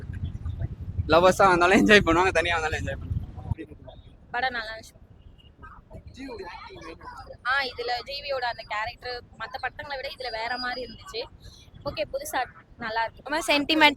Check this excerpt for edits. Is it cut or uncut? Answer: cut